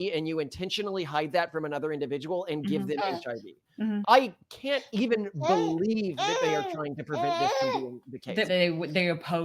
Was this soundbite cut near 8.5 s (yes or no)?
yes